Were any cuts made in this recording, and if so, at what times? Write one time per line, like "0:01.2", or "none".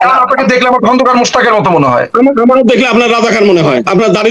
none